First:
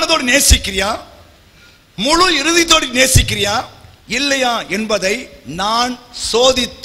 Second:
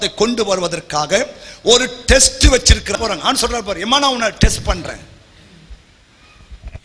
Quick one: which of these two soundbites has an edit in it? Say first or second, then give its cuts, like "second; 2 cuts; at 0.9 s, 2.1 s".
second; 1 cut; at 2.9 s